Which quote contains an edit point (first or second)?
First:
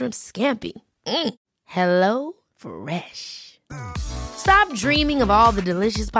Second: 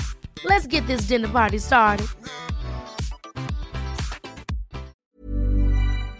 second